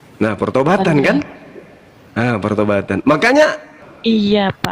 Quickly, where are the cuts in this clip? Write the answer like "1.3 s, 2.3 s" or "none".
3.8 s

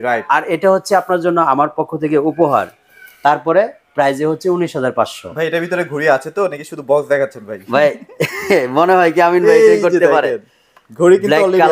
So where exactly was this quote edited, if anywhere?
none

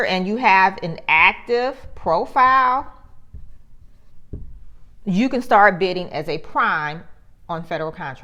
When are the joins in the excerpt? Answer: none

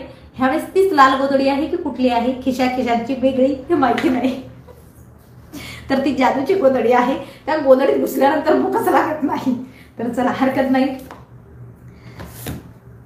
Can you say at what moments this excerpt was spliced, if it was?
none

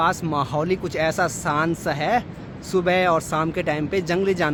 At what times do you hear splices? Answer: none

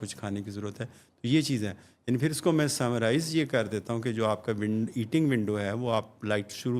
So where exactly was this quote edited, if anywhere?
none

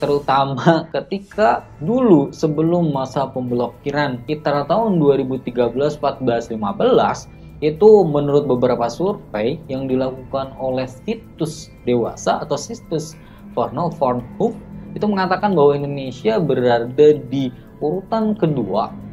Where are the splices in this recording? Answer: none

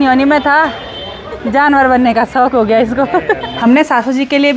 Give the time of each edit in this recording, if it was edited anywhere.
3.5 s

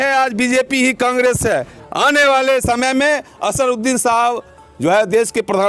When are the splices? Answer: 1.7 s

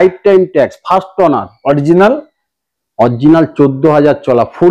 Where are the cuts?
none

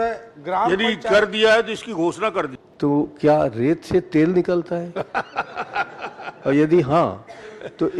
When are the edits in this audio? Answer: 2.6 s

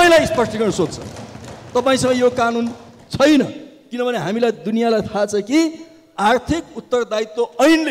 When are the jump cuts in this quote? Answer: none

